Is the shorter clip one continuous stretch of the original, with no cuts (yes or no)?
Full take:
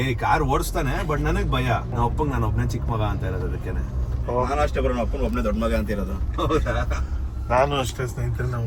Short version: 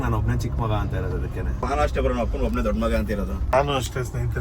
no